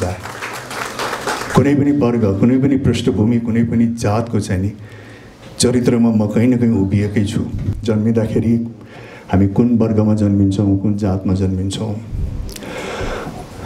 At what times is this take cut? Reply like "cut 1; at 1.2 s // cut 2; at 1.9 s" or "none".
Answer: cut 1; at 7.7 s